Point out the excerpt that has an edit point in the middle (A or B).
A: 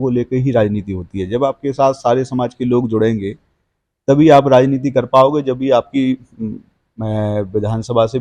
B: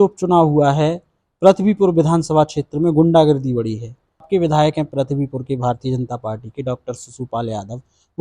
B